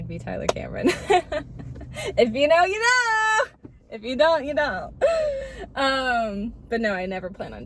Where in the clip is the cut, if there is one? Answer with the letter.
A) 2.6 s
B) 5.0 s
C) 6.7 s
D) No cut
D